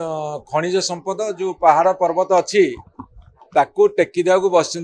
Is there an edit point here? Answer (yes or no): no